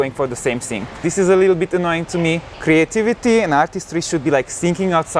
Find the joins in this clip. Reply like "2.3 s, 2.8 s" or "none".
1.0 s, 2.5 s